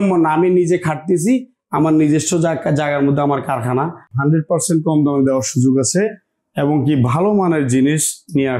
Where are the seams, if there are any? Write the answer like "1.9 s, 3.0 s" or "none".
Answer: 4.1 s

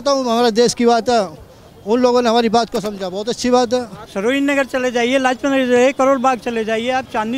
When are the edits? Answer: 4.0 s

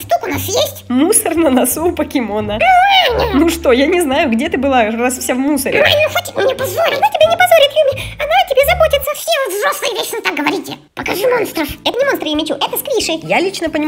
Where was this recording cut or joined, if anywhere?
none

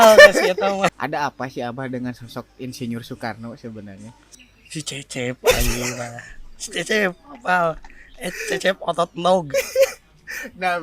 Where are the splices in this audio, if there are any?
0.9 s, 4.3 s

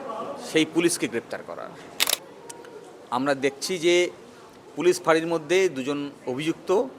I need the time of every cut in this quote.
2.1 s

